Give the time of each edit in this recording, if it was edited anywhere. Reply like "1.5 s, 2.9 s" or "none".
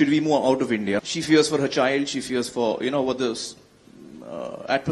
none